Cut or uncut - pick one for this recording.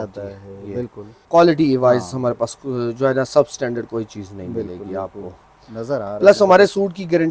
cut